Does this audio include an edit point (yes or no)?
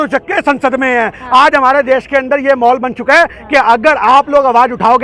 no